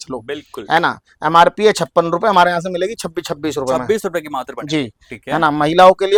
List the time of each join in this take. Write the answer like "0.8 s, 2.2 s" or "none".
none

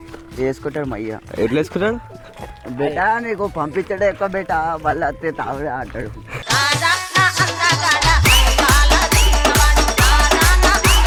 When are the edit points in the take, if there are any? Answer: none

